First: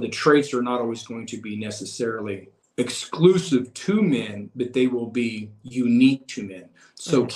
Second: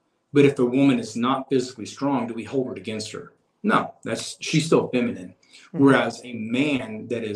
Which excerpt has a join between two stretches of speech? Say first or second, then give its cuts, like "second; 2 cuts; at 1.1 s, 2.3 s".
first; 1 cut; at 2.6 s